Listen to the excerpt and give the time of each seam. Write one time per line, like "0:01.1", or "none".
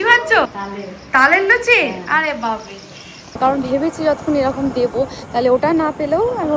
0:03.3